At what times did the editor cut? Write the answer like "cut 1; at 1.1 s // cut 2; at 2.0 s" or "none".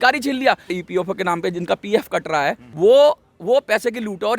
cut 1; at 0.8 s // cut 2; at 2.6 s